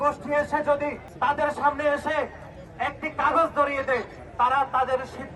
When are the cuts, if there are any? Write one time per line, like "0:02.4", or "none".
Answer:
0:01.0